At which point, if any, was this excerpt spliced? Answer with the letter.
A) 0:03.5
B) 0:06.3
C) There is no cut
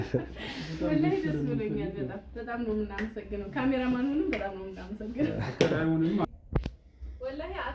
B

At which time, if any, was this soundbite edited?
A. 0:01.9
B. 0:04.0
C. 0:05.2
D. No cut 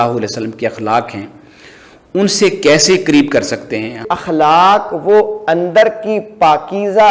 B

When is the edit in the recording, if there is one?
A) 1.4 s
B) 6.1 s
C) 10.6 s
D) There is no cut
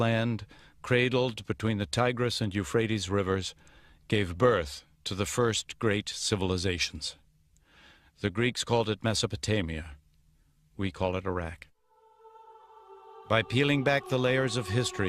D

